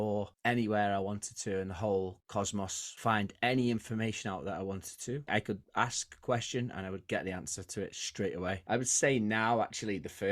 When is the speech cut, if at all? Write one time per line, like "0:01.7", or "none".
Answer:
0:02.8
0:05.3
0:08.6